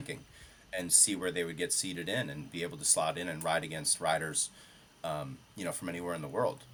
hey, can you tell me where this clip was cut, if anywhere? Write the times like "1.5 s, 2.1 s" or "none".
none